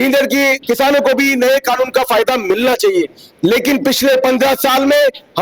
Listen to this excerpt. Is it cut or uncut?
uncut